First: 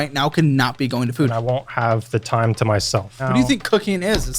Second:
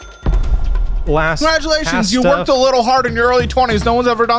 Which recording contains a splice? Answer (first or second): first